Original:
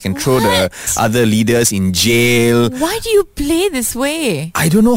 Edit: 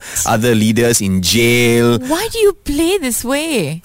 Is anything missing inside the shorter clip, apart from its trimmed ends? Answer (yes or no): no